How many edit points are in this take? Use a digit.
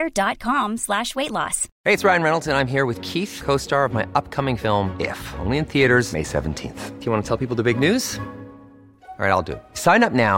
1